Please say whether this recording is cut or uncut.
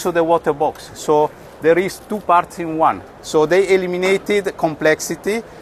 uncut